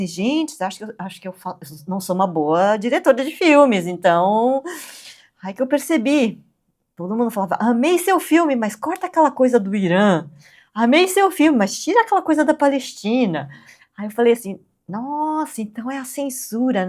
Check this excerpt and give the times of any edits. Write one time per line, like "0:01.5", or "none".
none